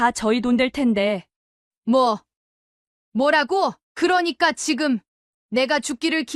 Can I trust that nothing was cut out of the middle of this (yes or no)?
no